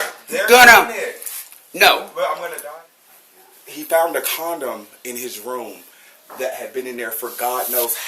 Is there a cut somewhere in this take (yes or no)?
yes